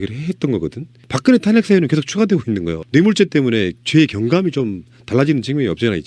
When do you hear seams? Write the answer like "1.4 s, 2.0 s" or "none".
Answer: none